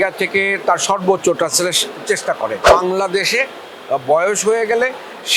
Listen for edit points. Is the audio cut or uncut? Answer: cut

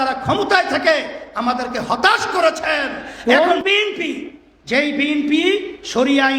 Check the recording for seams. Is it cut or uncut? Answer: cut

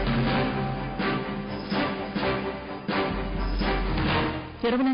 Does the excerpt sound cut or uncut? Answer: uncut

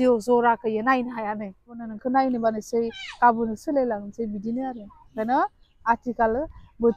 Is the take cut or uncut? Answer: cut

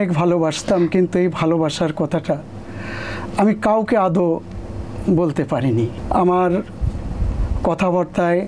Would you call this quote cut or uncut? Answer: uncut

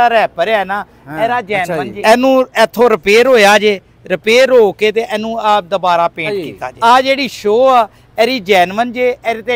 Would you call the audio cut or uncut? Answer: cut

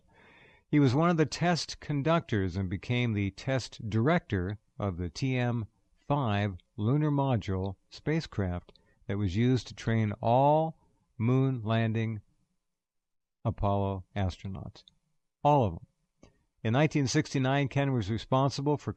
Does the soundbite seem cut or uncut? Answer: uncut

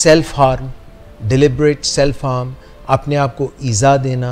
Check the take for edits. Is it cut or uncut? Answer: uncut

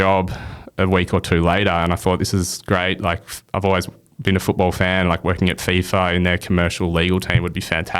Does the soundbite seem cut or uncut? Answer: uncut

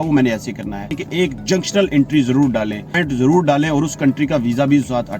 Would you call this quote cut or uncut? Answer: cut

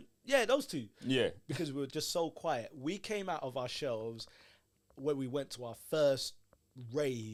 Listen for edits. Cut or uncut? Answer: uncut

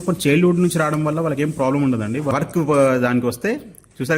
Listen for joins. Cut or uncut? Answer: cut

